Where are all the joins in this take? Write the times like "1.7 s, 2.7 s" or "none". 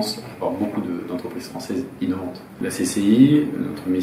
2.6 s